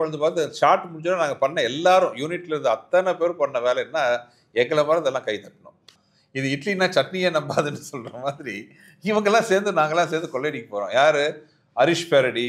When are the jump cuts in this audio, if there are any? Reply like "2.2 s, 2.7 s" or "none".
6.0 s